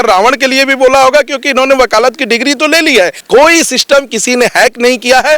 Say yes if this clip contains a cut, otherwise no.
yes